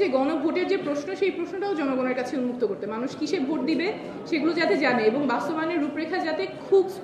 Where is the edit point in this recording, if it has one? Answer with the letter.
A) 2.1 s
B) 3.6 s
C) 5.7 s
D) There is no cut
D